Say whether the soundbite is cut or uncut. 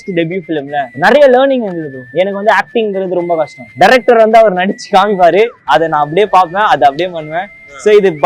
cut